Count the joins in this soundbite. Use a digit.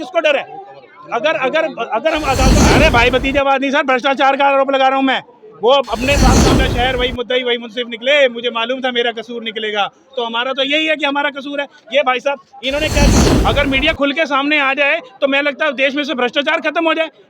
3